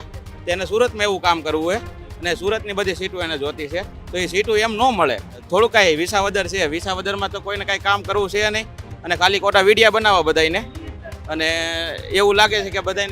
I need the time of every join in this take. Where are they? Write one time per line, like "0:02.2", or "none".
0:05.4